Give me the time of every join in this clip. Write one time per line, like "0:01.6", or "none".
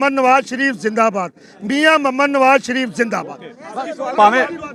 none